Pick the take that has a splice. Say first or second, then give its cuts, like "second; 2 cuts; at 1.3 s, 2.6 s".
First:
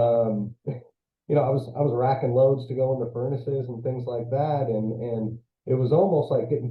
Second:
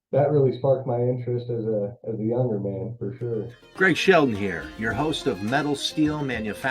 second; 1 cut; at 3.6 s